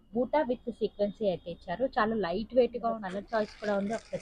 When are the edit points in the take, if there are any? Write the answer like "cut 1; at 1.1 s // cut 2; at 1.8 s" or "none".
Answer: cut 1; at 3.0 s